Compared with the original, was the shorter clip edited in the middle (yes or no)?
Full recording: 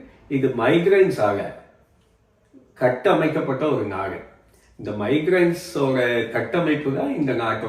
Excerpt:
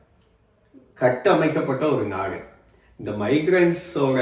no